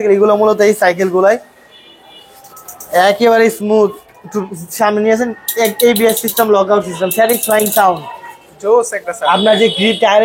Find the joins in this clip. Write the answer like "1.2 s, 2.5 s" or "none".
none